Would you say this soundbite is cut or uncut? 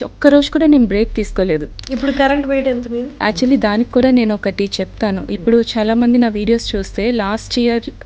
cut